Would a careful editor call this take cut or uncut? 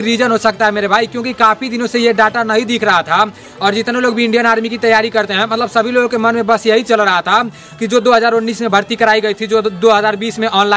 uncut